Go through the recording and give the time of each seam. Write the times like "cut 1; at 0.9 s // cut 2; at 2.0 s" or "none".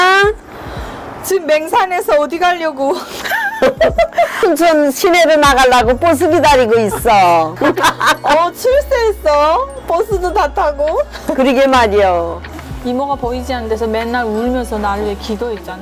cut 1; at 12.6 s